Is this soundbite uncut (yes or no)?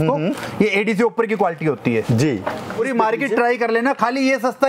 no